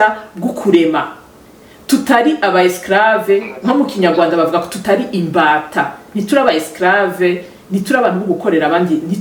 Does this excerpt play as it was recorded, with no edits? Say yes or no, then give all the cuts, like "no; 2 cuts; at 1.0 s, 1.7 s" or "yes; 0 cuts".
yes; 0 cuts